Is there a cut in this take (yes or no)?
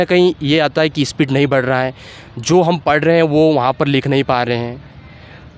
no